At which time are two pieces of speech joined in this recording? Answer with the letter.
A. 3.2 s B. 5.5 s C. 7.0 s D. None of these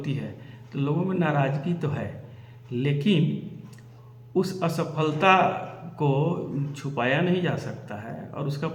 D